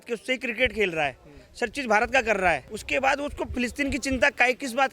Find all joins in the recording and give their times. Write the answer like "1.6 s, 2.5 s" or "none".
2.7 s